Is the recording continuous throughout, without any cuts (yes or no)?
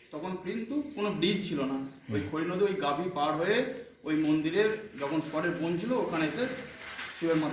yes